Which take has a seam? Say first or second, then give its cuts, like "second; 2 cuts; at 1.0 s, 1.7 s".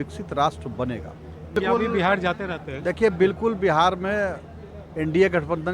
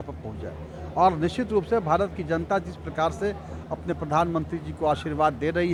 first; 1 cut; at 1.6 s